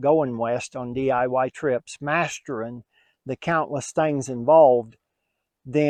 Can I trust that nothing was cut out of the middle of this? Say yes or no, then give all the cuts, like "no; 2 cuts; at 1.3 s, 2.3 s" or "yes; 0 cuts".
yes; 0 cuts